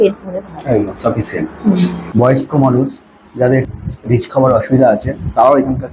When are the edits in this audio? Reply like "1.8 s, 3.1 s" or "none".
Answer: 2.0 s, 3.7 s